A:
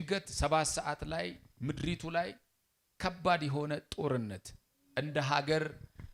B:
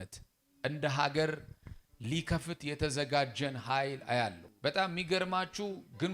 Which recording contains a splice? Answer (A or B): B